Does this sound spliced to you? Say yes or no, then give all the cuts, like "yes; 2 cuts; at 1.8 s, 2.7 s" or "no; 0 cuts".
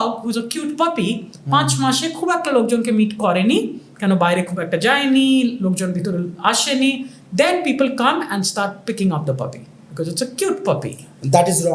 no; 0 cuts